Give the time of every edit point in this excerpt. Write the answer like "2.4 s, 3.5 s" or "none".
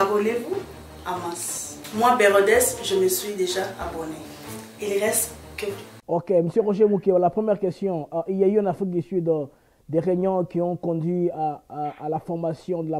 5.9 s

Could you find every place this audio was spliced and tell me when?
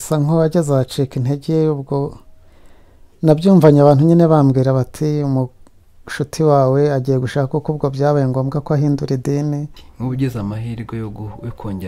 9.8 s

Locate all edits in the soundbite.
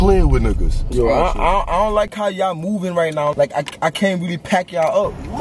0.9 s, 3.3 s

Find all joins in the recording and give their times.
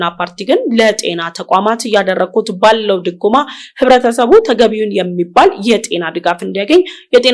none

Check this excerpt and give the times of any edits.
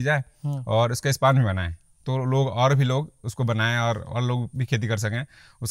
none

